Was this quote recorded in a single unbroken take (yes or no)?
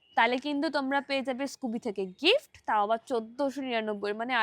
yes